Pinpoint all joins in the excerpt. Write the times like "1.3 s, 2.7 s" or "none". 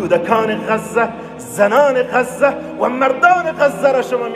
none